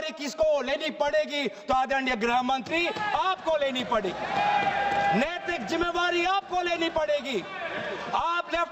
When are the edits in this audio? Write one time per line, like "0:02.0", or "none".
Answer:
none

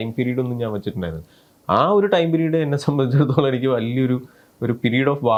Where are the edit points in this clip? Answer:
none

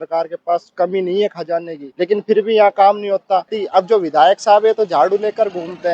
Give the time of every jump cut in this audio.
0:01.8
0:03.6

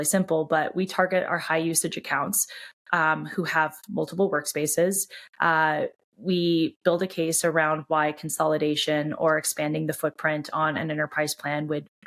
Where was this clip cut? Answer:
none

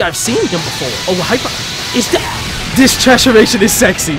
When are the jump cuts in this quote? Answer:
0:00.9

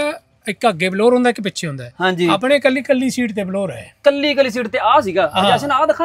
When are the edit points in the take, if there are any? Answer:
none

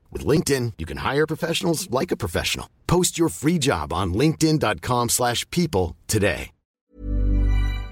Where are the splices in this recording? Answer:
0:06.9

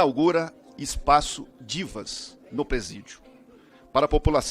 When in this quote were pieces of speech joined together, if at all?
none

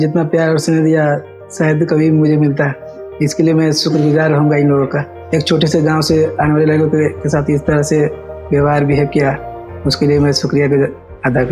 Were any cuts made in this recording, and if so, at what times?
none

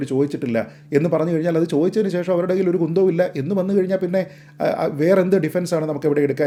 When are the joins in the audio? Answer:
none

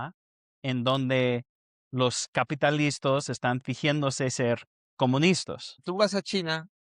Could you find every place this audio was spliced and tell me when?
0:05.8

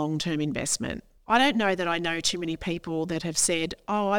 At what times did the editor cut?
0:01.1

